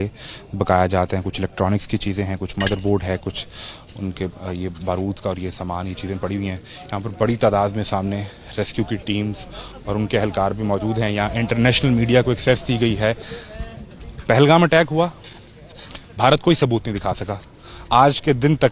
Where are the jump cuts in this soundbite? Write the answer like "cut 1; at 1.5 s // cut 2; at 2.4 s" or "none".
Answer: none